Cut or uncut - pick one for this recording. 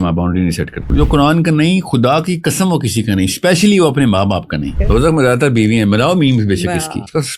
cut